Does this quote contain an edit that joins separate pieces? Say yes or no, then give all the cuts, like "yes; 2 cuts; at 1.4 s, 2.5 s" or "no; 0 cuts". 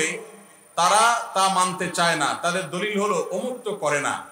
no; 0 cuts